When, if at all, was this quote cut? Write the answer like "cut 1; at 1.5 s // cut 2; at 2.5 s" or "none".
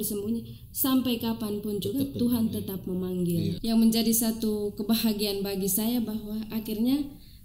cut 1; at 3.6 s